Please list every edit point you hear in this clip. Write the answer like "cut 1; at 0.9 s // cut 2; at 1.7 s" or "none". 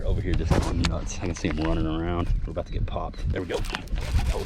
cut 1; at 3.3 s